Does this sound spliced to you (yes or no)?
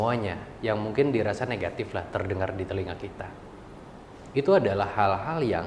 no